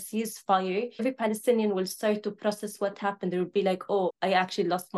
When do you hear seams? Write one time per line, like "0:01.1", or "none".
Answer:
0:01.0
0:04.1

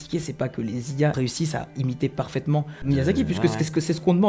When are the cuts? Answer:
0:01.2
0:02.9

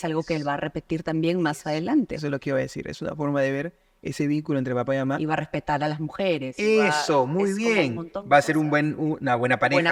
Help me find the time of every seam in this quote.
none

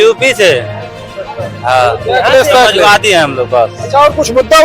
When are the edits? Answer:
0:02.4

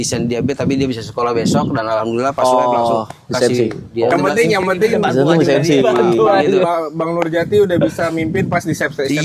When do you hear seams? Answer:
0:04.1

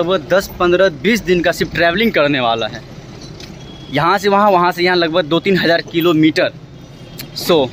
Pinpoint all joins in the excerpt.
none

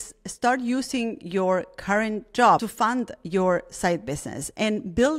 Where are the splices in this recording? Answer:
0:02.7

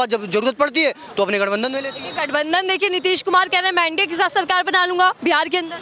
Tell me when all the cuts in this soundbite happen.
0:01.9

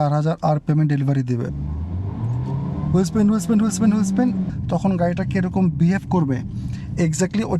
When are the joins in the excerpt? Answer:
0:01.5
0:04.5

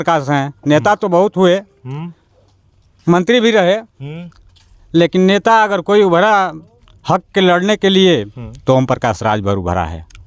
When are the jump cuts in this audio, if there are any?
none

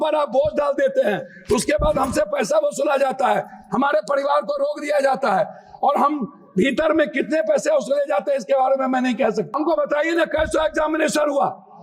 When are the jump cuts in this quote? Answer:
0:09.5

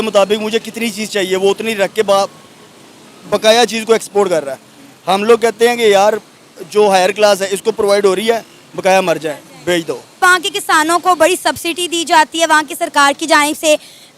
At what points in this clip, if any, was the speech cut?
none

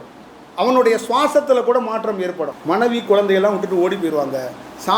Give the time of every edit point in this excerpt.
0:02.5

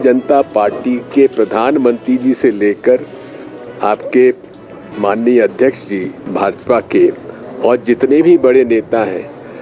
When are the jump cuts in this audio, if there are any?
0:06.2

